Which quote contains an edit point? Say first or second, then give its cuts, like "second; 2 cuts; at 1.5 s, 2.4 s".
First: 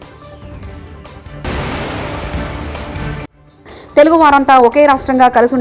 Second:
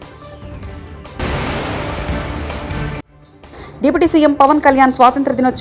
first; 2 cuts; at 1.2 s, 3.4 s